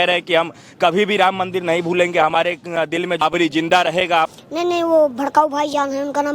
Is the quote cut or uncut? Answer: cut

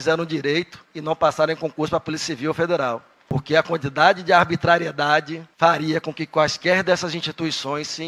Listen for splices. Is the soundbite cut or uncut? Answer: uncut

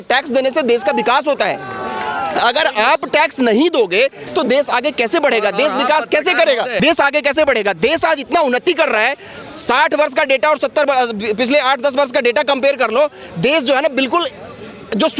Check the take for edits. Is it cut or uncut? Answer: cut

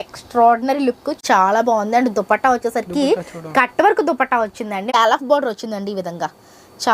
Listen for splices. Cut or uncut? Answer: cut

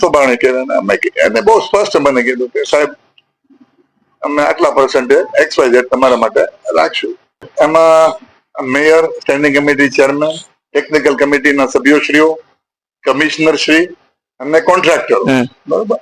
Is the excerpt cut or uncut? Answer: cut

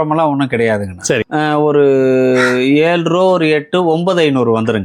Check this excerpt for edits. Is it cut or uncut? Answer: cut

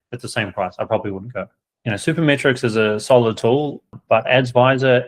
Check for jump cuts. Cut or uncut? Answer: cut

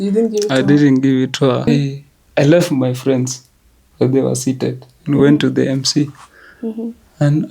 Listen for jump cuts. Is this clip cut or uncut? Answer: cut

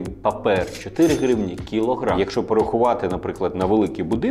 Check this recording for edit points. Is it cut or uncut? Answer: uncut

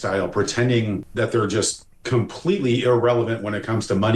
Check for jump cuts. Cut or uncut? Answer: cut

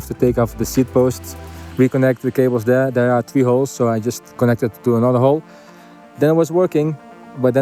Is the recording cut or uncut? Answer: uncut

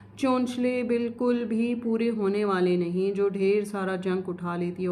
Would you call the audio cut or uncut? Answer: uncut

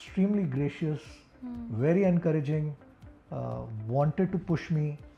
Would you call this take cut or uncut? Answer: uncut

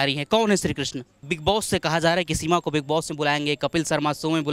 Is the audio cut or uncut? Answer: cut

